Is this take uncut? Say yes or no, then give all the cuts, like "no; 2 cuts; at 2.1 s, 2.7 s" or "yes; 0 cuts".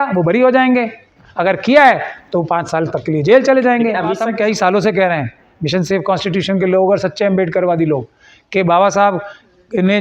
no; 1 cut; at 4.3 s